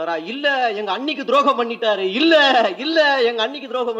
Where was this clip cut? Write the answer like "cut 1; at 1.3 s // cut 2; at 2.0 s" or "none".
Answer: none